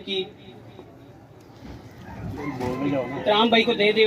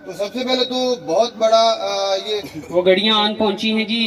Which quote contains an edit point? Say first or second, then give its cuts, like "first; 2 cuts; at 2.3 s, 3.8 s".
second; 1 cut; at 2.5 s